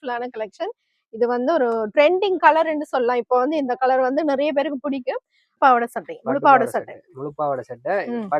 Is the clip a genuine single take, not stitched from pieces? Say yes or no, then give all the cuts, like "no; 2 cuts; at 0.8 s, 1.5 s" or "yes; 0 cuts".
no; 1 cut; at 5.6 s